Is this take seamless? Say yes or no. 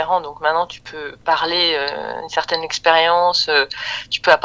yes